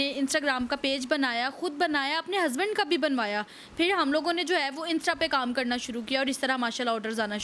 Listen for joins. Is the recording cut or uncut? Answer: uncut